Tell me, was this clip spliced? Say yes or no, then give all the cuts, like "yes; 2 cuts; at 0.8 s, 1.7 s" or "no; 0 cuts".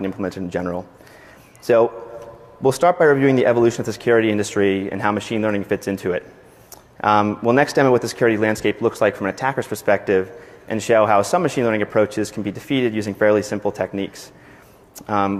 no; 0 cuts